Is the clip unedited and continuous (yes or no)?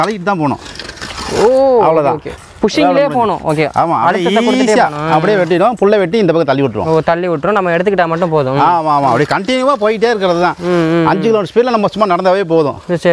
yes